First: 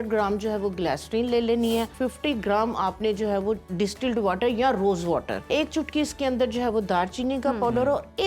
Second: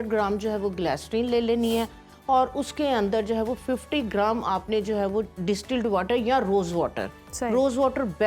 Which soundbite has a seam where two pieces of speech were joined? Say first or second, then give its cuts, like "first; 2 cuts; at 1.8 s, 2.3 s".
first; 2 cuts; at 1.9 s, 5.4 s